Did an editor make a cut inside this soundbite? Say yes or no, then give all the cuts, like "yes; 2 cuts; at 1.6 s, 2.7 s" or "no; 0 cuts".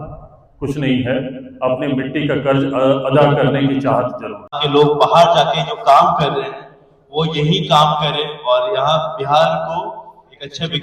yes; 1 cut; at 4.6 s